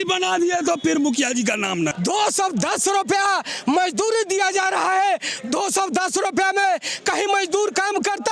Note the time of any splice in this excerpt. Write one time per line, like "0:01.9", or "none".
0:01.9